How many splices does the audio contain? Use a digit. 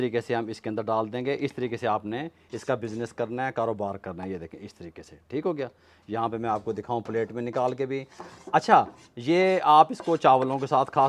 0